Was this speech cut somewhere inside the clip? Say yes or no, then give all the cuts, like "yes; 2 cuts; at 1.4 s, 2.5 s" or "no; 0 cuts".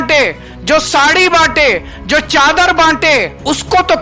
no; 0 cuts